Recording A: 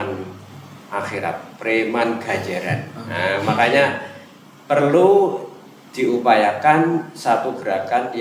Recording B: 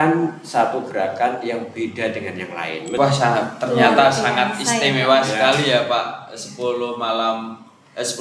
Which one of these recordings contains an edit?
B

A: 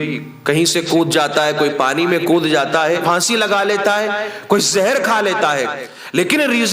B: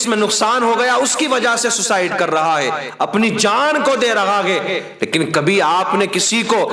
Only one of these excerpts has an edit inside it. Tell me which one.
A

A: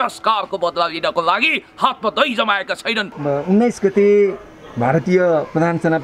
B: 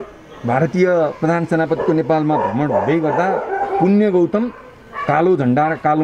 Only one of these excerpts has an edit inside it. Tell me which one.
A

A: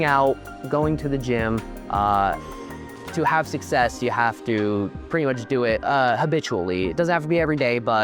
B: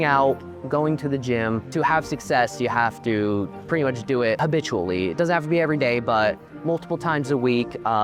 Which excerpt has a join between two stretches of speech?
B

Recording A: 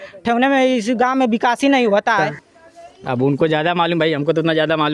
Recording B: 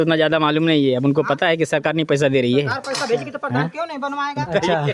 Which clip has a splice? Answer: A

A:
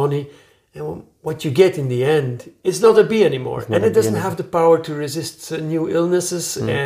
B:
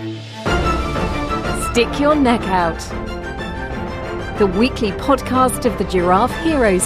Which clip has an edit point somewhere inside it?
A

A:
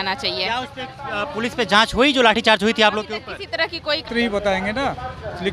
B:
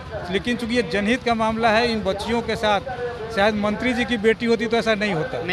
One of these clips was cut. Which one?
A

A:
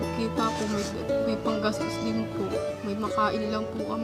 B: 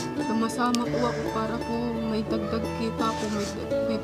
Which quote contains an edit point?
A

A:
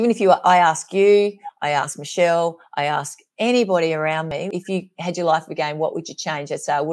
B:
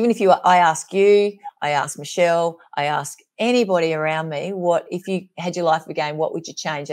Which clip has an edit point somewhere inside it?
A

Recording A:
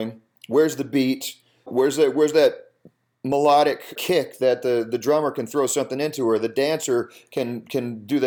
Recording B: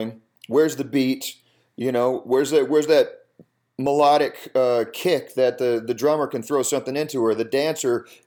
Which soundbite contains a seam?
A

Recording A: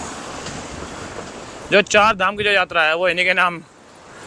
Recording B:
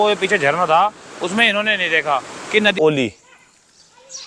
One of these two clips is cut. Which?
B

